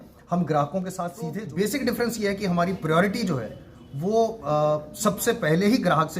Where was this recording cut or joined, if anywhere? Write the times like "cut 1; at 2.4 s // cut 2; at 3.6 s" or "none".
cut 1; at 1.3 s